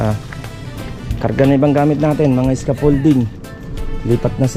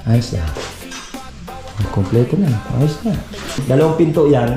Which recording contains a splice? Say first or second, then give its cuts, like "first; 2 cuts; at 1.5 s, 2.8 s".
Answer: second; 1 cut; at 3.6 s